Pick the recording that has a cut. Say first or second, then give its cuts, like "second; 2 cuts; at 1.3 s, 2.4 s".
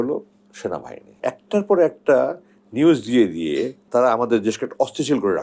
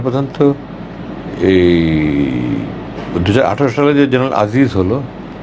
first; 2 cuts; at 1.2 s, 3.8 s